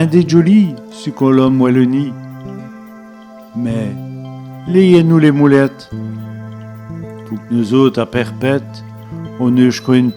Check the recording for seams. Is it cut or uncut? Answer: uncut